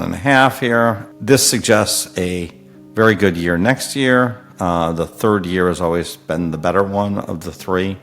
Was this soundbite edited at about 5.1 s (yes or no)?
no